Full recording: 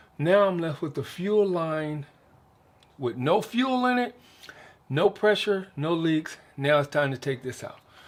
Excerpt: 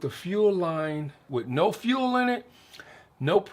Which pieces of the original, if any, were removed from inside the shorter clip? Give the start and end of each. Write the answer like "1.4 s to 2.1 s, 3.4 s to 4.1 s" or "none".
2.1 s to 2.8 s